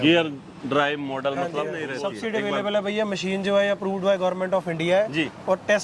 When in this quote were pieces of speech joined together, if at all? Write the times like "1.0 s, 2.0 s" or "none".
1.8 s